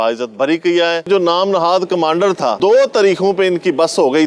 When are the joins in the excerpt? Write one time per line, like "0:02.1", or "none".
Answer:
0:01.1
0:02.6